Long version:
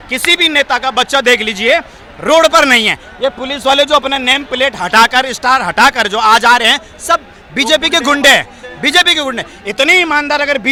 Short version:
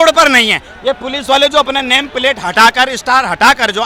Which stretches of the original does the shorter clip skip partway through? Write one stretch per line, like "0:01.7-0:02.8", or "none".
none

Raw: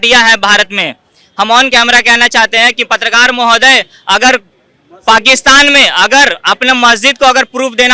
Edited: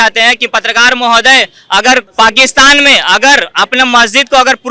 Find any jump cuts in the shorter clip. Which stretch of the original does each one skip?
0:04.5-0:05.0

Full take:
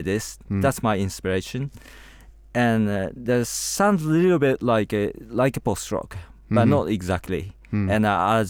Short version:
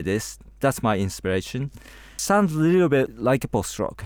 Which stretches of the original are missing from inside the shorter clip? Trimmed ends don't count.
0:02.1-0:03.6
0:04.6-0:05.2

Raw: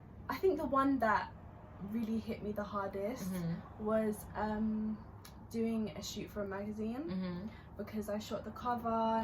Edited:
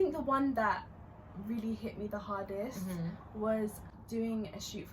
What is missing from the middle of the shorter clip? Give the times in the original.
0:04.3-0:05.2

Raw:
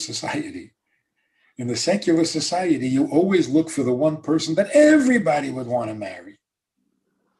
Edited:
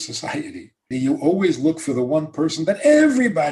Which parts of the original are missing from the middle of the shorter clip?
0:00.9-0:02.8

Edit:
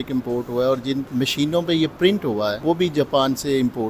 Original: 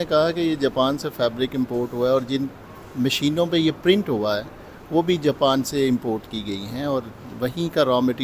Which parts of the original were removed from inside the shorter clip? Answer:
0:02.5-0:02.9
0:04.4-0:04.9

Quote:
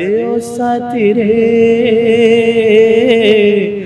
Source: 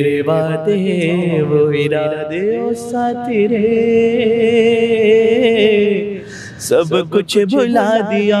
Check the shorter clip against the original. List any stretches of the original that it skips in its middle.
none

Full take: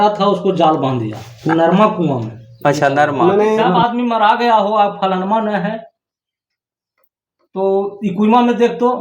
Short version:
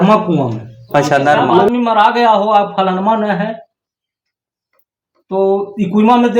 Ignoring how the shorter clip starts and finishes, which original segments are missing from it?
0:03.4-0:03.9

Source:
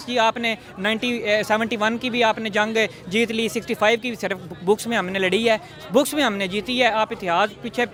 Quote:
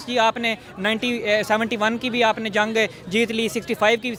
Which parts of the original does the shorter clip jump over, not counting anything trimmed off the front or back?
none

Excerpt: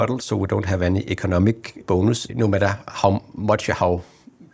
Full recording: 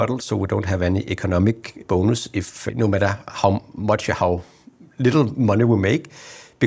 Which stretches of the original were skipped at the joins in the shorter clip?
0:01.9-0:02.3

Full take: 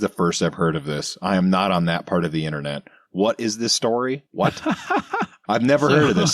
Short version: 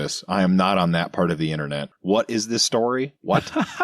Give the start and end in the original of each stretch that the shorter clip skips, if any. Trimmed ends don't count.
0:02.8-0:03.0

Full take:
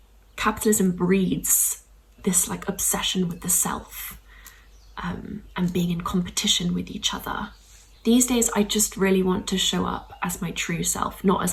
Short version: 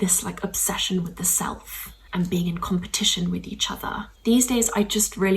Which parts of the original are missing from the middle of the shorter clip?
0:04.3-0:05.4
0:07.5-0:07.9

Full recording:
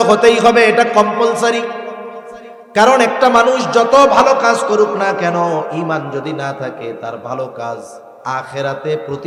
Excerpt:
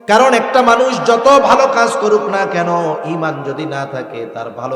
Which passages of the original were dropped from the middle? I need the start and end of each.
none

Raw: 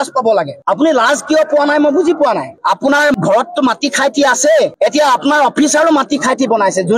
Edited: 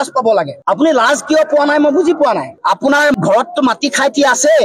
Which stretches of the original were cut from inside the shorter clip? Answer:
none

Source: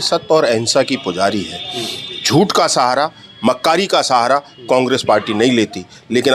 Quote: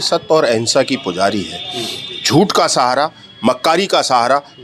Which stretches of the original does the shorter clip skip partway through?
none

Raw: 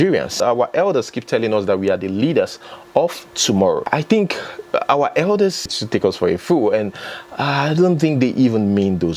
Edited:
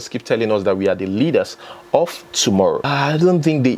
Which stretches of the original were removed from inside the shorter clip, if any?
0:03.8-0:07.4

